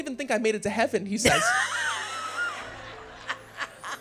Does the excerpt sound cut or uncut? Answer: uncut